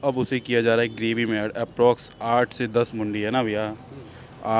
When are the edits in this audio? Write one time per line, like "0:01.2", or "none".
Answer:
none